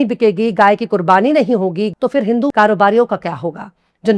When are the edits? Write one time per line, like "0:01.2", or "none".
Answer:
0:01.9